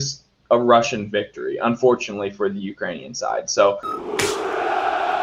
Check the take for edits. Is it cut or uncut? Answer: uncut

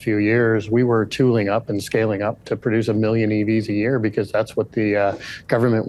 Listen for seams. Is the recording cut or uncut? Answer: uncut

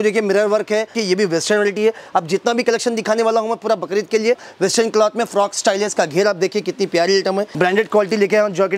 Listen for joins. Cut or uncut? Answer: cut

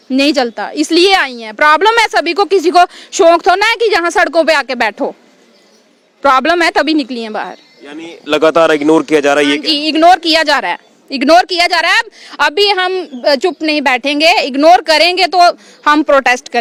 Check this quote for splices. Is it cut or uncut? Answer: uncut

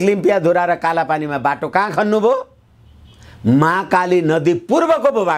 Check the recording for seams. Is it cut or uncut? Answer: uncut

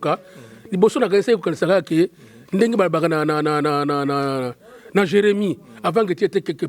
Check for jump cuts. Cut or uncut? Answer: uncut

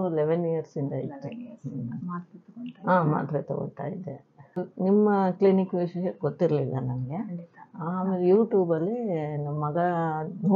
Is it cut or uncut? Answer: cut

